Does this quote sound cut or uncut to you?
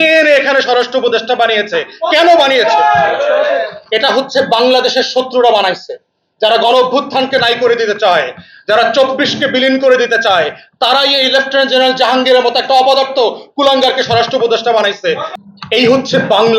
cut